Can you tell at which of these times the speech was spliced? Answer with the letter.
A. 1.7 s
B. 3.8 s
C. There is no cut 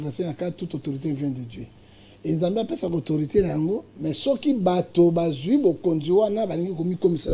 C